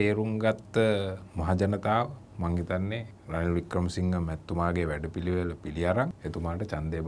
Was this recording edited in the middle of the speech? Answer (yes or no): yes